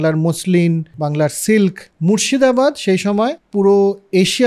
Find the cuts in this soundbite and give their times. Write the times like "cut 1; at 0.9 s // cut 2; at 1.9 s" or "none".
cut 1; at 0.9 s // cut 2; at 1.9 s // cut 3; at 3.4 s